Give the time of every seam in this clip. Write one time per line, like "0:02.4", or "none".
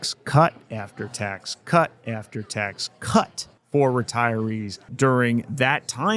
0:04.9